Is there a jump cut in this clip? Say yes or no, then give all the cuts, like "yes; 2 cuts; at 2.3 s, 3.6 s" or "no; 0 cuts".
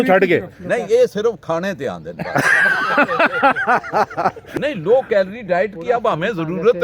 yes; 1 cut; at 4.4 s